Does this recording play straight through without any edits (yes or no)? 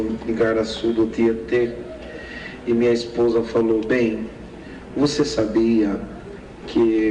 no